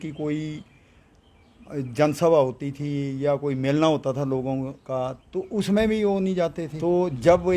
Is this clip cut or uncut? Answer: cut